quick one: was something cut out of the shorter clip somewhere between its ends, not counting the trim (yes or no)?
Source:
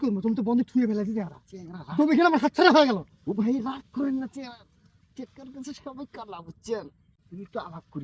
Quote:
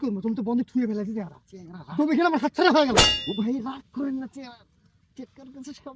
no